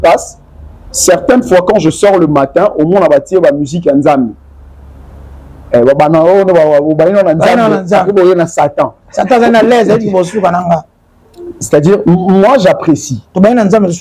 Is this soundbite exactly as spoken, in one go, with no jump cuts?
yes; 0 cuts

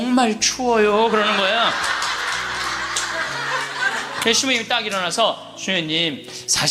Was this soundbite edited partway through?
yes; 1 cut; at 4.1 s

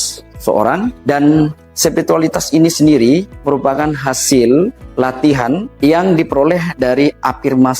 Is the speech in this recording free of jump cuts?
no; 4 cuts; at 1.0 s, 1.6 s, 3.3 s, 5.4 s

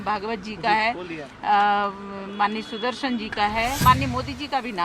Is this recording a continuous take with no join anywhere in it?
no; 1 cut; at 3.8 s

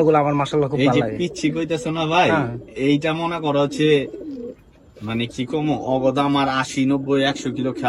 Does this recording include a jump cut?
no; 0 cuts

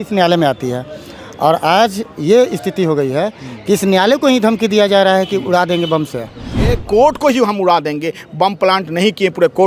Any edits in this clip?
yes; 1 cut; at 6.8 s

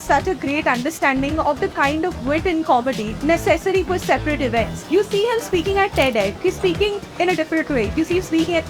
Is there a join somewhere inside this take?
yes; 4 cuts; at 3.1 s, 4.8 s, 6.3 s, 7.9 s

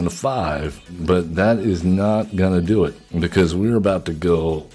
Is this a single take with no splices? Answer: no; 2 cuts; at 0.9 s, 3.0 s

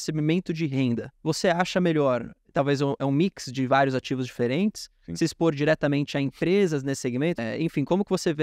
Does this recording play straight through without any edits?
no; 2 cuts; at 1.1 s, 7.4 s

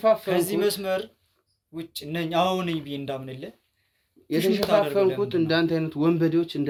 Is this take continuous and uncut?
yes; 0 cuts

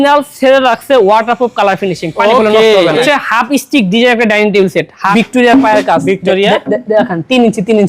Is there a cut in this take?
yes; 2 cuts; at 3.0 s, 5.1 s

